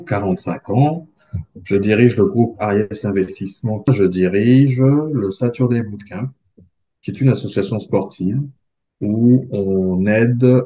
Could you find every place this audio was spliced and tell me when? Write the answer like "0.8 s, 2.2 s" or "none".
3.9 s